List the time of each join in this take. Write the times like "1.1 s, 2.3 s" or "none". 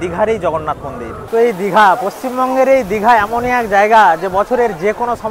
1.2 s